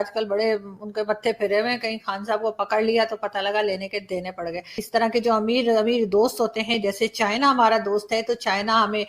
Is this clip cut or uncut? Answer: cut